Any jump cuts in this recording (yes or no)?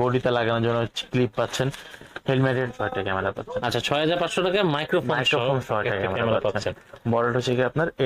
yes